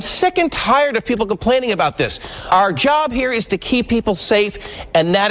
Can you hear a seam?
no; 0 cuts

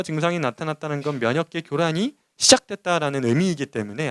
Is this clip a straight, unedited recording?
yes; 0 cuts

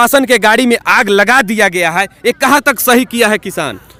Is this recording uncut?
yes; 0 cuts

